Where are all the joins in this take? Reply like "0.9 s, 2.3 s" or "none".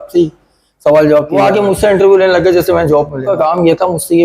1.4 s, 3.3 s